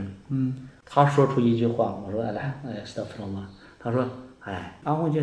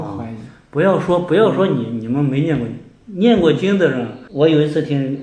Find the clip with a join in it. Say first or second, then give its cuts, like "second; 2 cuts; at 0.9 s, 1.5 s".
second; 1 cut; at 4.2 s